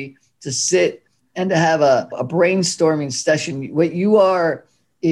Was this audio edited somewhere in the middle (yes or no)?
no